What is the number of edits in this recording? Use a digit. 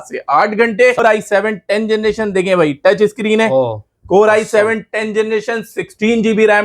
1